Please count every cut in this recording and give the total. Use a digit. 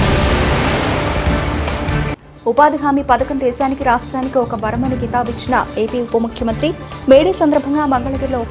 0